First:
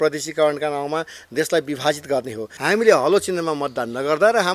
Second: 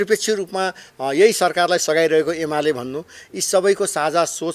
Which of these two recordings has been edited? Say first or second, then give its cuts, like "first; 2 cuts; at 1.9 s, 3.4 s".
first; 1 cut; at 2.5 s